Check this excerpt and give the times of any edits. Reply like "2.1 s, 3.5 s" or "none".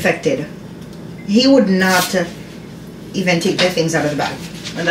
none